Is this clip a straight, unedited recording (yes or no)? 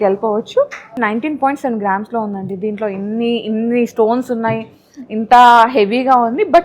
no